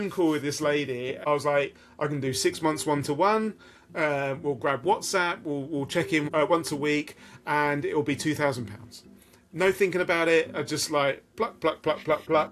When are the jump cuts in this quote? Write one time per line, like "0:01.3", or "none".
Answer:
0:01.2
0:06.2